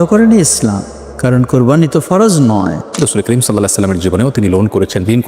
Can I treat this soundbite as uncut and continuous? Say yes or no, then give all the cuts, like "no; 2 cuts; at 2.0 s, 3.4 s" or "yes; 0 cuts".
no; 1 cut; at 3.0 s